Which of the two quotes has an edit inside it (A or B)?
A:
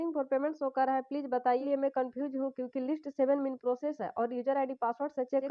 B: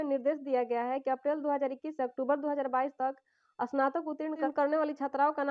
A